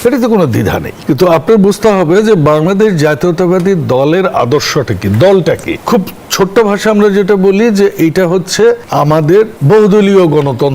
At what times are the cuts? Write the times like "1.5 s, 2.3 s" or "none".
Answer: 0.9 s, 5.7 s, 9.3 s